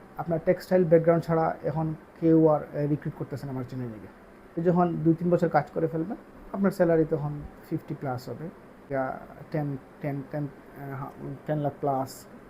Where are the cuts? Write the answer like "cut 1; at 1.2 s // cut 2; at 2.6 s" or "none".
cut 1; at 4.6 s // cut 2; at 8.8 s